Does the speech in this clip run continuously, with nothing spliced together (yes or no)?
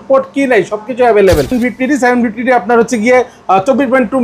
no